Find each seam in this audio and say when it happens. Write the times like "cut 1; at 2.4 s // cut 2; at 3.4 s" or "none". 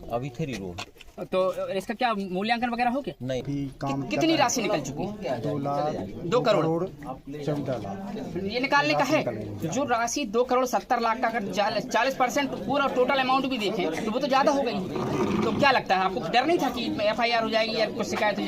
cut 1; at 3.4 s